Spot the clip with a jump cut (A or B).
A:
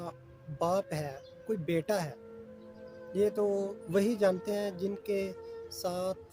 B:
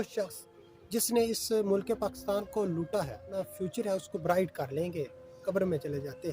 B